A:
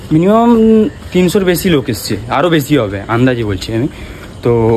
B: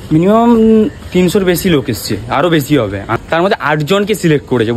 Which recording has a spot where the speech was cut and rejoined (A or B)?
B